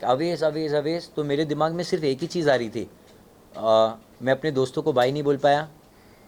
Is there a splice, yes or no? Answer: no